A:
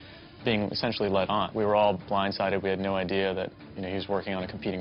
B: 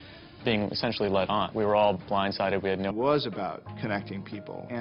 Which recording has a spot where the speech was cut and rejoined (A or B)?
A